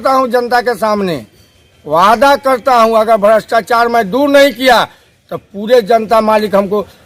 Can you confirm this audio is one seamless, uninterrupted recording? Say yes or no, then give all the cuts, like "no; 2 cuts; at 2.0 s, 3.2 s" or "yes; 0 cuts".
yes; 0 cuts